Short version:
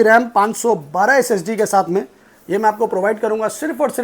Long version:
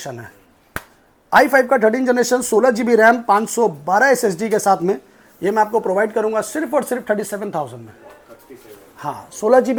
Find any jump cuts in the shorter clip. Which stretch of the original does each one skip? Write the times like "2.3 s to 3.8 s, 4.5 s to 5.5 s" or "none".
none